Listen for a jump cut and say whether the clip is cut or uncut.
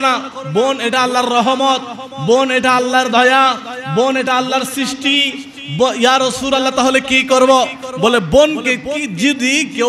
uncut